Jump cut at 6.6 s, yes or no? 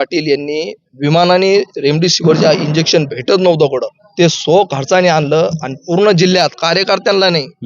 no